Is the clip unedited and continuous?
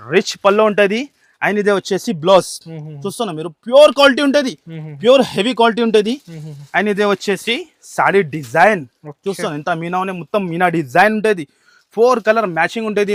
yes; 0 cuts

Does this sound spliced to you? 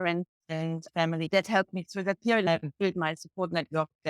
yes; 2 cuts; at 1.3 s, 2.5 s

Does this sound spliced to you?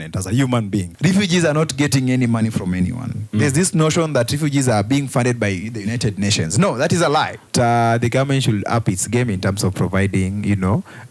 yes; 2 cuts; at 0.9 s, 7.5 s

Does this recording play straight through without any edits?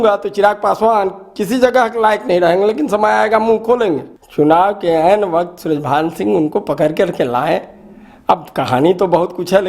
no; 1 cut; at 4.1 s

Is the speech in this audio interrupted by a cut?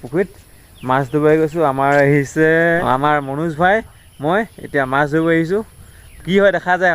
yes; 1 cut; at 2.8 s

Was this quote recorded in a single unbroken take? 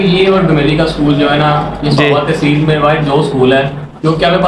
yes; 0 cuts

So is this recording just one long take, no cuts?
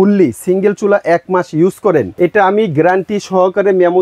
no; 1 cut; at 2.1 s

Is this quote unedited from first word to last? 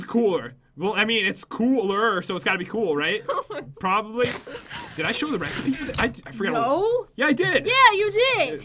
yes; 0 cuts

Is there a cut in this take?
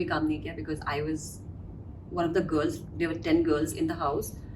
no; 0 cuts

